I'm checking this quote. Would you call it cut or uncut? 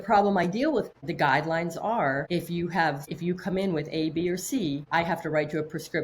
cut